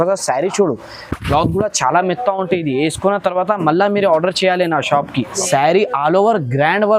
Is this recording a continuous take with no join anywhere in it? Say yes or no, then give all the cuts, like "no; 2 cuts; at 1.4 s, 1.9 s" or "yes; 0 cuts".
no; 1 cut; at 5.4 s